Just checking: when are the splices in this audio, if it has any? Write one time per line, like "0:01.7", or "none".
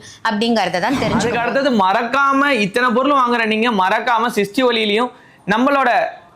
0:01.3